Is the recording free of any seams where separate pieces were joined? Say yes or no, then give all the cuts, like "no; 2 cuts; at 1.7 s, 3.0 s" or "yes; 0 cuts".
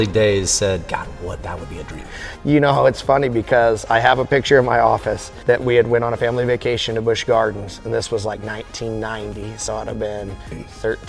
yes; 0 cuts